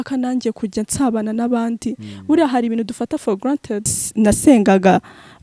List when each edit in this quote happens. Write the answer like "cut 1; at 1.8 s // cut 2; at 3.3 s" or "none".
cut 1; at 4.0 s